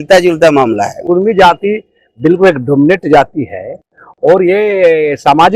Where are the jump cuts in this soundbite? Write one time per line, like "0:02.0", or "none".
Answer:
0:01.0